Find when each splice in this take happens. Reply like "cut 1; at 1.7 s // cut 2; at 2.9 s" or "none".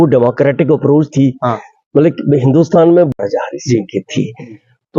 cut 1; at 3.1 s